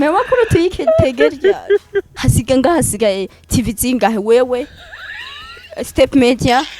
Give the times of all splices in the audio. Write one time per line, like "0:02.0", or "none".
0:02.1